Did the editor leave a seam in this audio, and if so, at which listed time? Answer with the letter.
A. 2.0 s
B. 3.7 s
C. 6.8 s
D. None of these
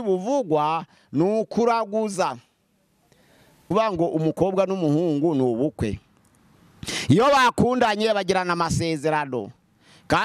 B